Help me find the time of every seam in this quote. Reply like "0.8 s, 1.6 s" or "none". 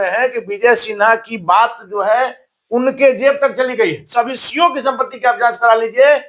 4.0 s